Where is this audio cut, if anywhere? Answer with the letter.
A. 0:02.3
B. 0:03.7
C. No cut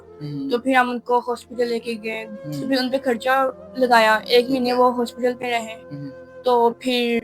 A